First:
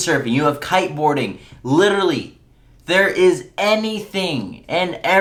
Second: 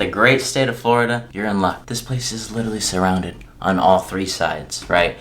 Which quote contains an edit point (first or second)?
second